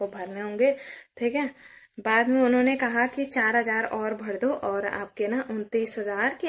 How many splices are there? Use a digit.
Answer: 0